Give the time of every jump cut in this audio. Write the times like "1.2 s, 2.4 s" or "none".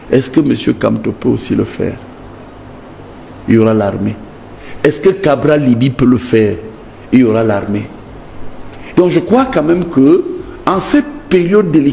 none